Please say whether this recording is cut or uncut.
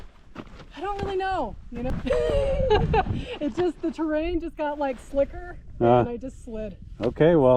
cut